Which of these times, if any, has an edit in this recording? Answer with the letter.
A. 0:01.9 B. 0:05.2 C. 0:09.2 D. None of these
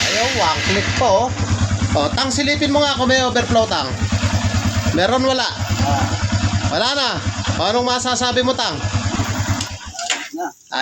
C